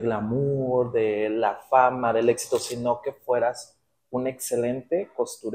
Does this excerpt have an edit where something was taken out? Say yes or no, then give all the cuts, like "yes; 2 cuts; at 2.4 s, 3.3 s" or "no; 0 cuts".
no; 0 cuts